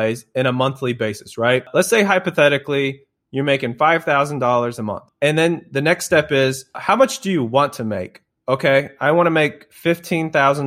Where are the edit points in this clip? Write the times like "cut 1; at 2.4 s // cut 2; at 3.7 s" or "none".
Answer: cut 1; at 1.7 s // cut 2; at 5.1 s // cut 3; at 6.8 s